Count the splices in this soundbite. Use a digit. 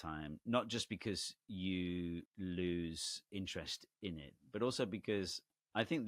2